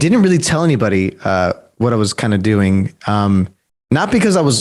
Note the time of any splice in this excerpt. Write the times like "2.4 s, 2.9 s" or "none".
none